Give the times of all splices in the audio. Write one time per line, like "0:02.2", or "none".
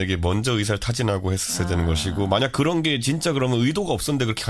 0:02.7

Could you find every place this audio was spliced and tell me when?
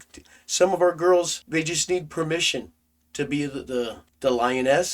0:01.4
0:04.0

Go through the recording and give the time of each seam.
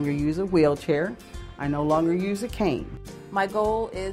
0:03.0

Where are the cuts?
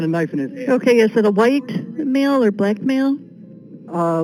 none

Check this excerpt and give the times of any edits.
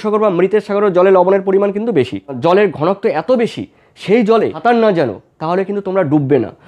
0:02.4
0:04.6

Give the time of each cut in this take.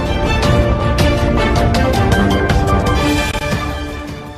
0:03.1

